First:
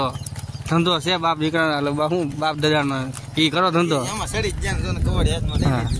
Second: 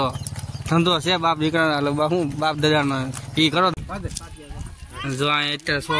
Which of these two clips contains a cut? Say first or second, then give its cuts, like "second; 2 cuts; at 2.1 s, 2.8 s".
second; 1 cut; at 3.7 s